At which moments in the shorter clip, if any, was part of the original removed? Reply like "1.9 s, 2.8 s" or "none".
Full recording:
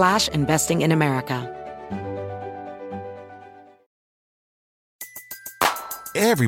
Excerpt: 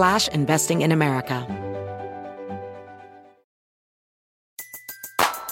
1.4 s